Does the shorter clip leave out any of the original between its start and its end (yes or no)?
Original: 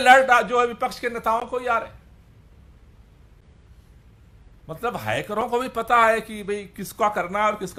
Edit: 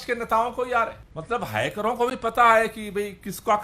yes